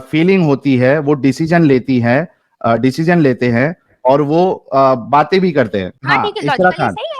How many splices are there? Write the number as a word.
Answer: one